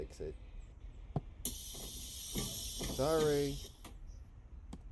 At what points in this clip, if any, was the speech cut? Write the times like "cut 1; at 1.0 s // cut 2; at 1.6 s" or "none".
none

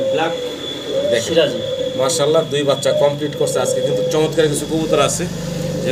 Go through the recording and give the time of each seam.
none

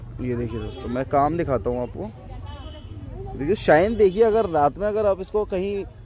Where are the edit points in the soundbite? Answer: none

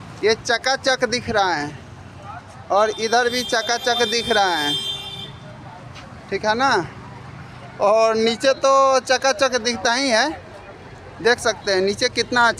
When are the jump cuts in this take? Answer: none

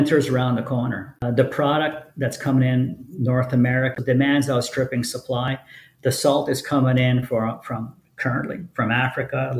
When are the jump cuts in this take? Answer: cut 1; at 1.1 s // cut 2; at 3.9 s

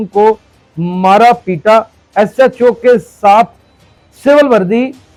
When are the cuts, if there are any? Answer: none

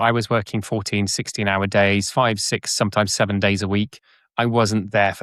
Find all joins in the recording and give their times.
none

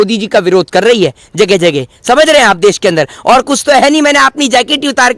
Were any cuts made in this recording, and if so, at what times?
none

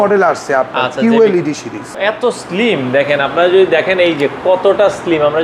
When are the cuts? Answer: cut 1; at 1.8 s

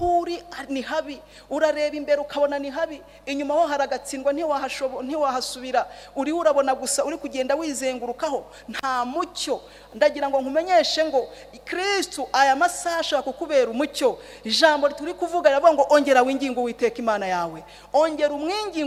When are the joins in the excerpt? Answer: none

